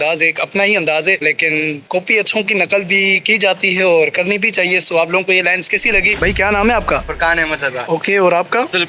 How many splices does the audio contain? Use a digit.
1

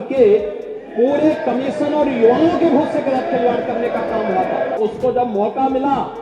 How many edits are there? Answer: 1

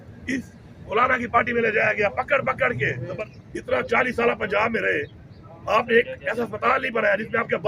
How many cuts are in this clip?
1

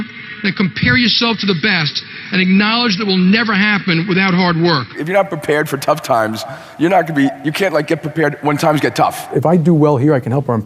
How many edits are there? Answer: 2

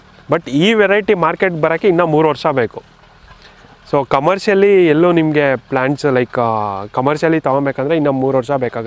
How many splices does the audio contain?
0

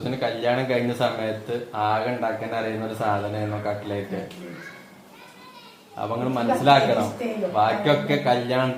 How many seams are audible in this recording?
0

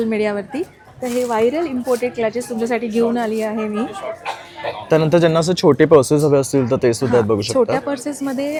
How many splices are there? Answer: 0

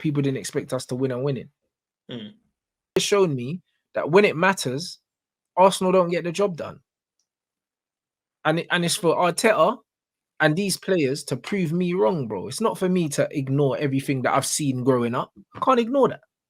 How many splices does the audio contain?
1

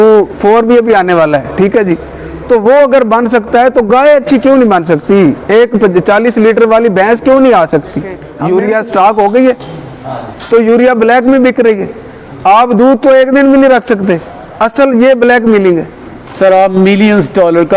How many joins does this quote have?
1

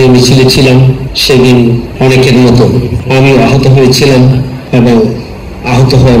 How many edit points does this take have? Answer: 4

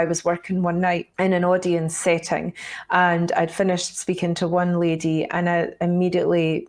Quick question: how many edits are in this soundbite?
1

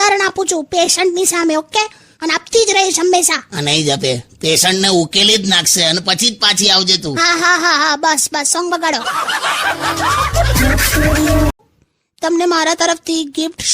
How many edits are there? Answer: 1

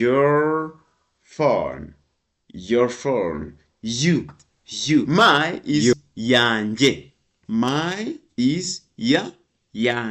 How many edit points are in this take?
1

